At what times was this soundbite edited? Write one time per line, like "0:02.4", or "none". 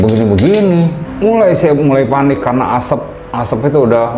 0:01.0